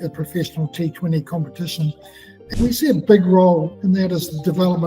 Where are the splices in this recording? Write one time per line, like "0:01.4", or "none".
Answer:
0:02.4
0:03.7